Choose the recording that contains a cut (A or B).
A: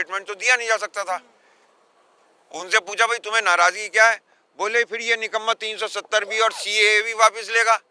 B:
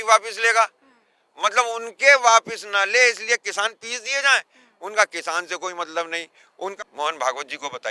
B